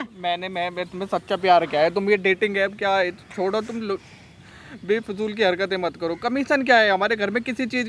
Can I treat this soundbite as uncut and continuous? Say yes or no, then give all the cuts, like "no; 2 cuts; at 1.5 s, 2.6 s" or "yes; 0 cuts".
yes; 0 cuts